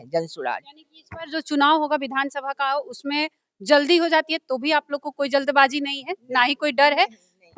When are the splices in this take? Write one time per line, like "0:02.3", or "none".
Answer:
none

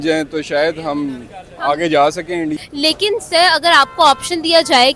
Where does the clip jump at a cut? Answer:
0:02.5

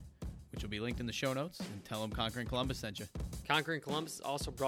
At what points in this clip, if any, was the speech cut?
0:03.3

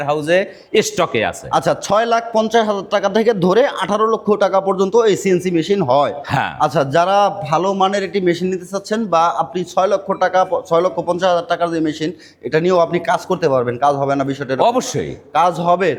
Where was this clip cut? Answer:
none

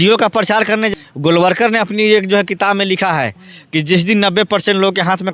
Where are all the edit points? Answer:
0:00.9

